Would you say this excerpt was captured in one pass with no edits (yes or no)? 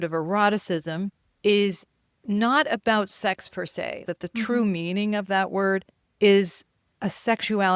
no